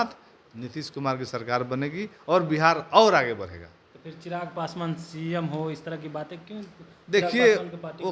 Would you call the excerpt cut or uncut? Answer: uncut